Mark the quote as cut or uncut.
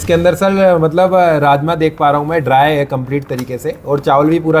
uncut